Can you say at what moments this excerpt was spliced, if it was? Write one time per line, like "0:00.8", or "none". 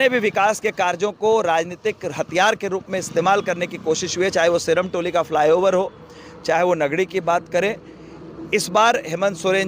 none